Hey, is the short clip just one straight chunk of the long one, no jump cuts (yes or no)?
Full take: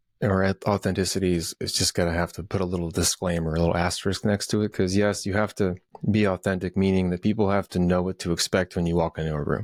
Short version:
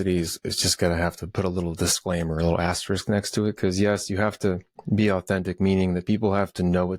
yes